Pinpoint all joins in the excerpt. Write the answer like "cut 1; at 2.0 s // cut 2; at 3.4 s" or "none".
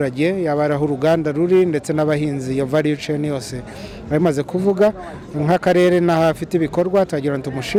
none